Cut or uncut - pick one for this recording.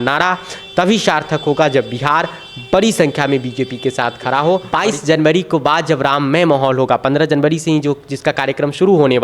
cut